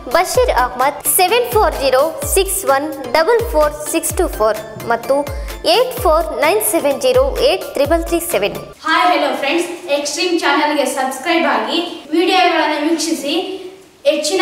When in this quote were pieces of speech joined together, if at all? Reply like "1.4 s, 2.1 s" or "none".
8.7 s